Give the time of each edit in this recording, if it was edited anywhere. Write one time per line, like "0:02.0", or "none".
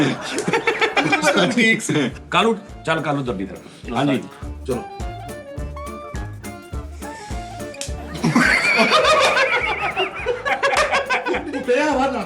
0:02.1